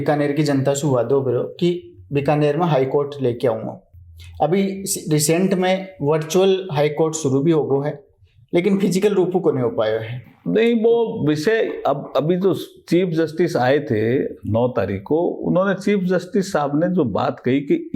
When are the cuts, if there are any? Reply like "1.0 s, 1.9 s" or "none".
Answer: none

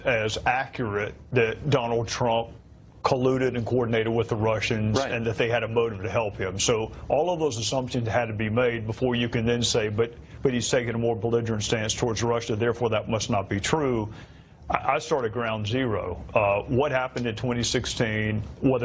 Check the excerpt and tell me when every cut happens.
none

